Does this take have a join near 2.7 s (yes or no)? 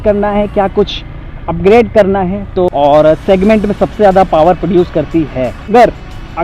yes